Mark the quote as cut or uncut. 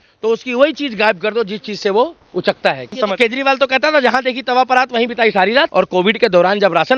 cut